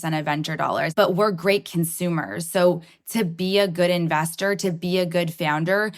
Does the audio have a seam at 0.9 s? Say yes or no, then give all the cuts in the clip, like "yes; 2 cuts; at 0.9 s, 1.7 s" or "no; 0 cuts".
yes; 1 cut; at 0.9 s